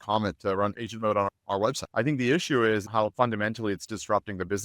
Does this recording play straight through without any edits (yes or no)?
no